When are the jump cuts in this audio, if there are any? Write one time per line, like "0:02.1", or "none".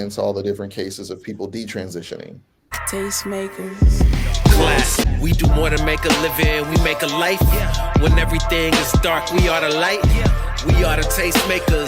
0:02.8